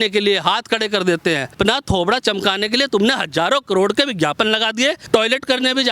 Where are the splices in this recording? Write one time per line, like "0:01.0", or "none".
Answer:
0:01.5
0:05.0